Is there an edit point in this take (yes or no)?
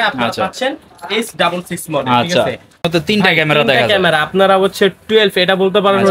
yes